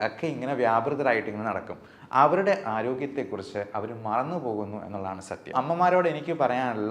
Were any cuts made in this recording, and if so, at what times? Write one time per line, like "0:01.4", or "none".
0:05.5